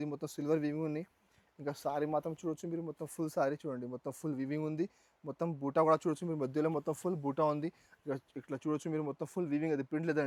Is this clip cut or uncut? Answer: uncut